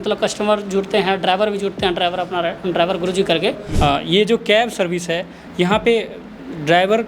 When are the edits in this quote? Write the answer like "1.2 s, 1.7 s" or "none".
3.6 s

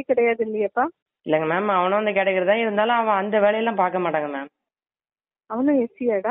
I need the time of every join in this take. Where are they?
1.1 s

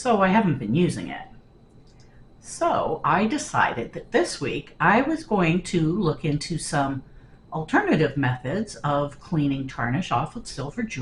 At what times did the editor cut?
none

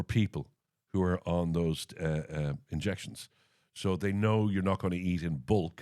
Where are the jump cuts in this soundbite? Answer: none

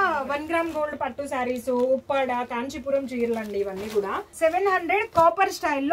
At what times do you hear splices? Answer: 4.3 s

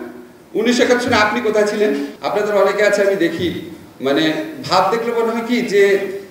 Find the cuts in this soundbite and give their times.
2.1 s

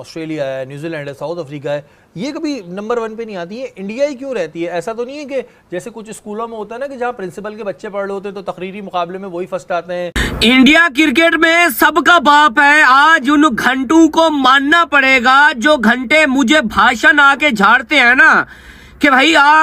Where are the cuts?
10.2 s

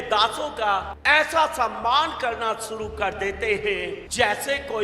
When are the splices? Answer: 0.9 s, 4.0 s

